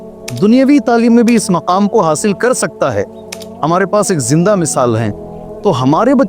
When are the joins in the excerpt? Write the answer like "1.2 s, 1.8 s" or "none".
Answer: none